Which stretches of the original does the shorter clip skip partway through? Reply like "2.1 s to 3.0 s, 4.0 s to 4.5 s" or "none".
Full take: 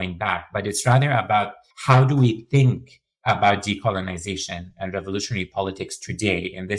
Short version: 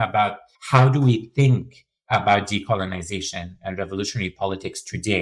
none